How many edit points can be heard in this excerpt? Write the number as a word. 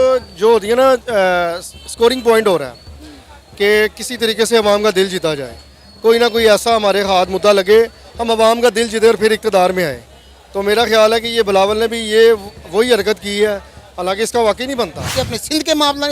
one